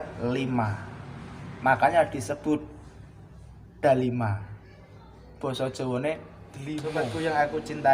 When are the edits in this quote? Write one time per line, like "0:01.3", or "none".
0:06.9